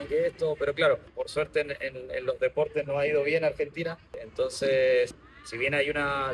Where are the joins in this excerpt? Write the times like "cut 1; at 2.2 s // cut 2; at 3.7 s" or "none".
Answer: cut 1; at 1.2 s // cut 2; at 4.2 s // cut 3; at 5.2 s